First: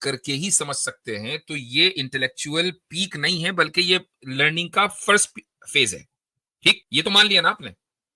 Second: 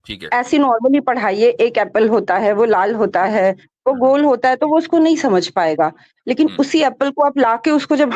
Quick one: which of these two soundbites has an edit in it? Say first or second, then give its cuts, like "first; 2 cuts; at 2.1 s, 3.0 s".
first; 1 cut; at 6.8 s